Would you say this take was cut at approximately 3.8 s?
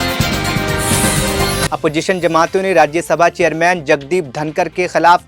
no; 1 cut; at 1.7 s

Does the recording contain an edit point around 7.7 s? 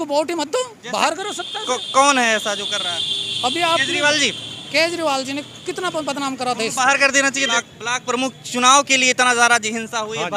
yes; 1 cut; at 7.7 s

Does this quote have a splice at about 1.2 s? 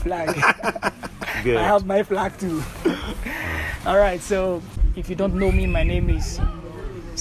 no; 0 cuts

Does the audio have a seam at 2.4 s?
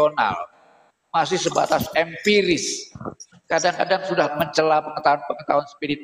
no; 1 cut; at 4.3 s

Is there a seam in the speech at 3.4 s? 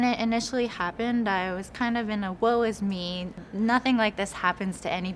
yes; 1 cut; at 3.4 s

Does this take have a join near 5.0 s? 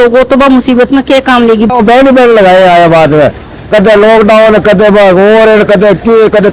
no; 1 cut; at 1.7 s

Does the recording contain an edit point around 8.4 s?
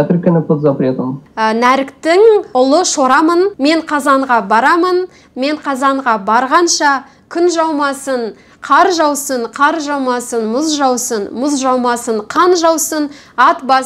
no; 1 cut; at 1.2 s

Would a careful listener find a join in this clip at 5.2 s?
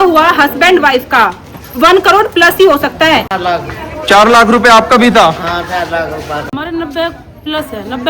no; 2 cuts; at 3.2 s, 6.5 s

